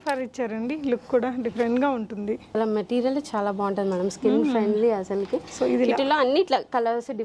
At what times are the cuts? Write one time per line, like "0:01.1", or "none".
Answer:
0:02.5